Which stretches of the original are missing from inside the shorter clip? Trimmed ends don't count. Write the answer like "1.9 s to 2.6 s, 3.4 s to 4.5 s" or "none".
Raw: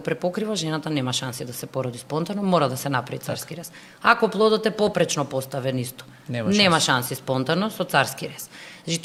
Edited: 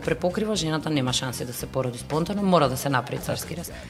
none